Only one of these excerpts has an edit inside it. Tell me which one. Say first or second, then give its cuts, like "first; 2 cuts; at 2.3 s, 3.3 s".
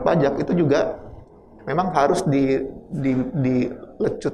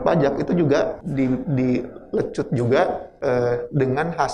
second; 2 cuts; at 1.0 s, 3.1 s